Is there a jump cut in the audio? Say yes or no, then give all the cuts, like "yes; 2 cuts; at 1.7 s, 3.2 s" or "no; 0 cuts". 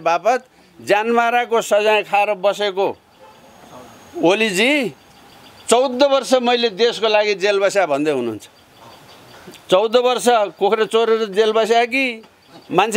no; 0 cuts